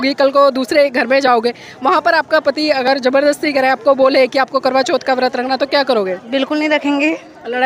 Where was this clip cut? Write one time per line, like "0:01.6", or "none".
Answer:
none